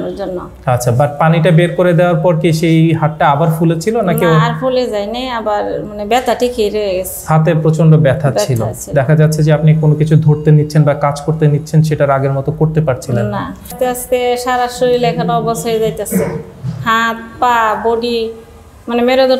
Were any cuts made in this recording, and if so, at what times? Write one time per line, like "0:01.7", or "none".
0:13.7